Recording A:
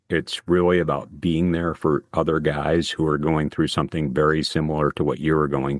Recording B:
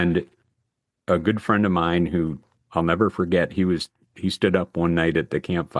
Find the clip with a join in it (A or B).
B